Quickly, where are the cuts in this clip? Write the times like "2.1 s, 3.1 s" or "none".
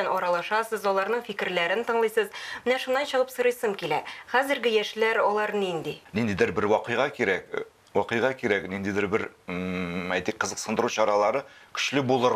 6.0 s